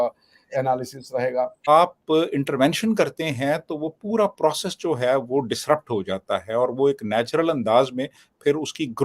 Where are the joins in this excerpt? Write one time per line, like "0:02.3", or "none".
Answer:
0:01.7